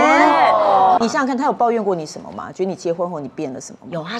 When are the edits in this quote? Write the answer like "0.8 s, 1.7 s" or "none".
1.0 s